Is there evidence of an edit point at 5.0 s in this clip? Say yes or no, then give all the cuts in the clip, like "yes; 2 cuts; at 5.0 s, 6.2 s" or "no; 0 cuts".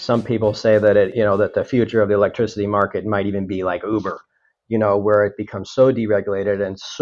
no; 1 cut; at 1.1 s